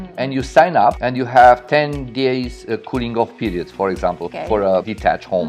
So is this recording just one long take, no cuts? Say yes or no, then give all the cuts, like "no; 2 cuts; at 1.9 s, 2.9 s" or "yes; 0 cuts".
no; 2 cuts; at 1.0 s, 4.4 s